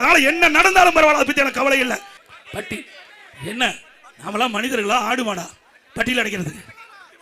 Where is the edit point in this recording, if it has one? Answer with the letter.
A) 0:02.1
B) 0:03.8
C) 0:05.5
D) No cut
A